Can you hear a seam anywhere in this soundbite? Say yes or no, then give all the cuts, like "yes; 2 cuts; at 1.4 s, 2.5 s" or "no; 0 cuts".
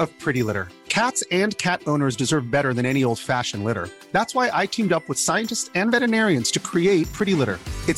no; 0 cuts